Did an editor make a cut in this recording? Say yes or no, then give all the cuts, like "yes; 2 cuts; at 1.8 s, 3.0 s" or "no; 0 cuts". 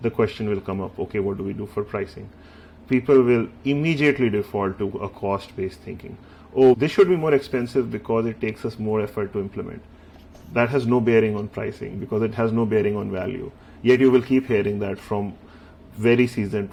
no; 0 cuts